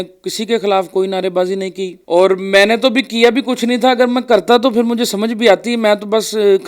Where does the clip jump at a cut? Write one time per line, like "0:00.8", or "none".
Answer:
0:01.9